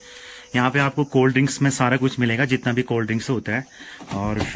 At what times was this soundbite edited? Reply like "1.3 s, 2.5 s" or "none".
none